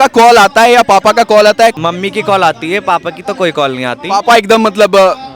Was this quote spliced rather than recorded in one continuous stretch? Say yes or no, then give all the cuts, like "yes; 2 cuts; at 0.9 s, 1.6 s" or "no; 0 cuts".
yes; 1 cut; at 1.8 s